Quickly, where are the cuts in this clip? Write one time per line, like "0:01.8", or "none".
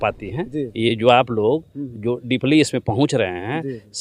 none